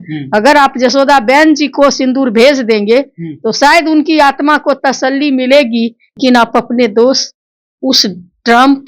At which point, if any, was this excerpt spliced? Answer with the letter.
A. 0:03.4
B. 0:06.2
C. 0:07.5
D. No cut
B